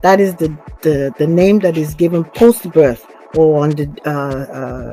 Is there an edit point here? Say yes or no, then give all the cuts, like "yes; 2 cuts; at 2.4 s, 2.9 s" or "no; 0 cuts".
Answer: no; 0 cuts